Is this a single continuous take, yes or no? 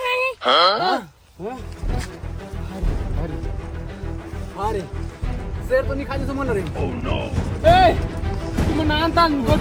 yes